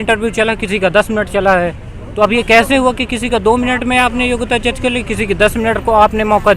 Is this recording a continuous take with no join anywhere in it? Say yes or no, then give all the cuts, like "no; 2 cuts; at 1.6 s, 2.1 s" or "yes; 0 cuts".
yes; 0 cuts